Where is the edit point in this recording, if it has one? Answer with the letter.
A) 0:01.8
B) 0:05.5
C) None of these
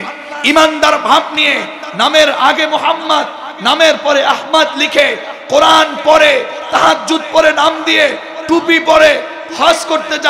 C